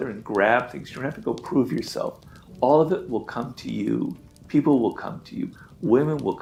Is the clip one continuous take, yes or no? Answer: yes